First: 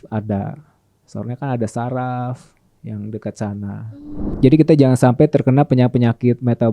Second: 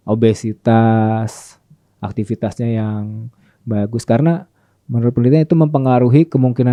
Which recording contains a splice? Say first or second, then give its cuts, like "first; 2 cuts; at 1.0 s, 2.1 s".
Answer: first; 1 cut; at 4.3 s